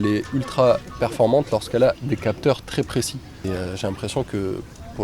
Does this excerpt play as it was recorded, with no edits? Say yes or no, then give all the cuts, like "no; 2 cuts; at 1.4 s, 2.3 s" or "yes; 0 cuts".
no; 1 cut; at 3.4 s